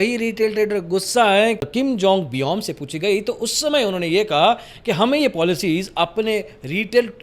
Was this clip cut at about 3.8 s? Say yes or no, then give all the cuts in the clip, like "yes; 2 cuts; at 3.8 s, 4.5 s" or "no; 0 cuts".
no; 1 cut; at 1.7 s